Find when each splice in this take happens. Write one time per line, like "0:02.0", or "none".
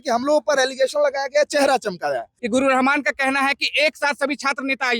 0:02.3

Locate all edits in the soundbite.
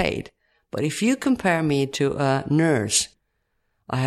0:03.1

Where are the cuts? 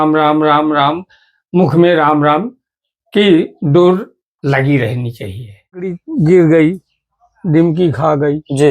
0:06.0

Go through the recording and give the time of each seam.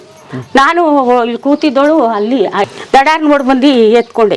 0:02.7

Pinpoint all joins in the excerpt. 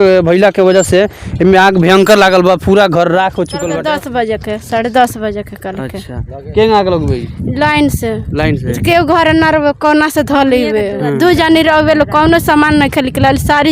0:03.7

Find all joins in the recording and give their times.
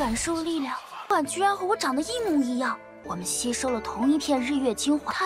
none

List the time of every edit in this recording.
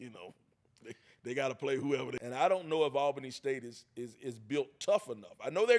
0:02.2

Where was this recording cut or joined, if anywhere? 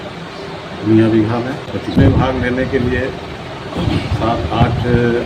0:01.8

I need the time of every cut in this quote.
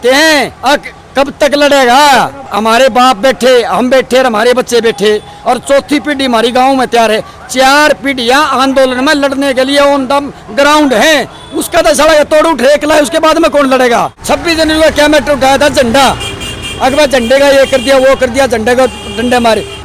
none

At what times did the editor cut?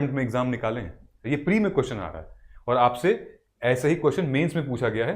0:01.1

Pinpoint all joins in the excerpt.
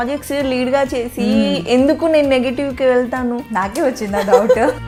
none

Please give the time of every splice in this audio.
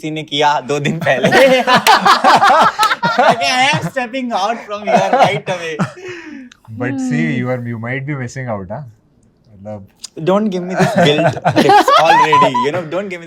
none

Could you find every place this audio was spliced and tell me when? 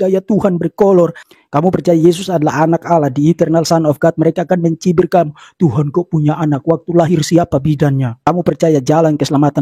none

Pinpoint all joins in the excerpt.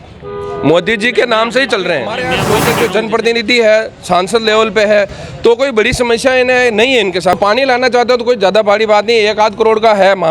0:02.5
0:07.4

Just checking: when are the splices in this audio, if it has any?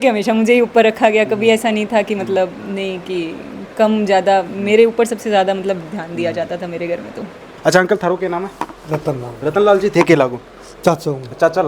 none

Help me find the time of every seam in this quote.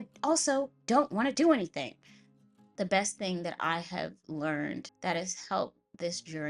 0:02.6
0:04.9

